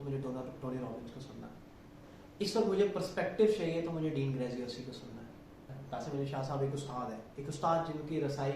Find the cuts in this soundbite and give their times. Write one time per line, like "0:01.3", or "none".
0:05.7